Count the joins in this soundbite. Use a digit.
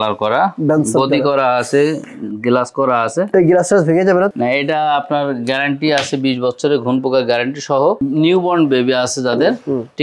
2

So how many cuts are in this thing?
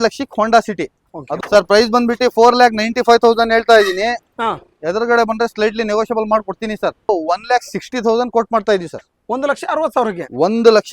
2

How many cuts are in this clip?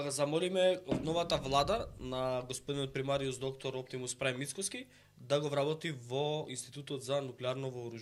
0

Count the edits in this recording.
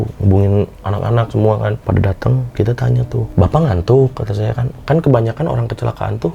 2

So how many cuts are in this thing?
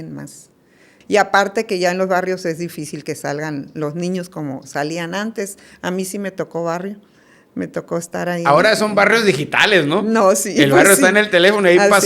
1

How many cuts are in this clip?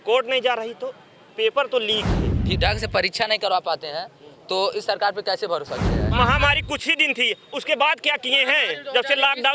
2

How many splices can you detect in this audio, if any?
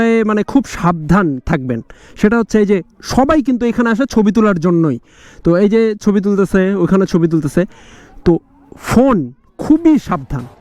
0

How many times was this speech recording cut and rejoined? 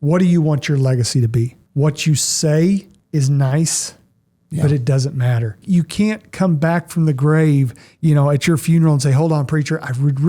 3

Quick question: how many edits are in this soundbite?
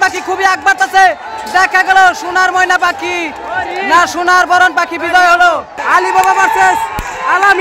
1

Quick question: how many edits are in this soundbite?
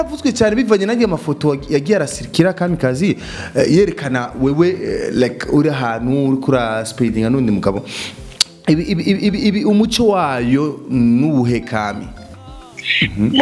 1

